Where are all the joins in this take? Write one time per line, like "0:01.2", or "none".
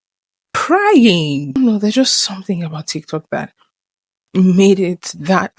0:01.5